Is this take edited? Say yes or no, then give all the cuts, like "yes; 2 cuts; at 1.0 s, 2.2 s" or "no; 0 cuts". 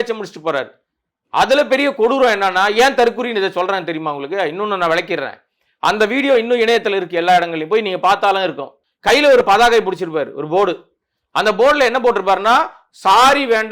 yes; 1 cut; at 8.8 s